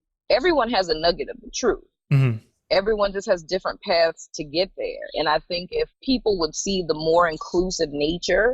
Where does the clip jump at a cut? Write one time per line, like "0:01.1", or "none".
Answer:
0:06.0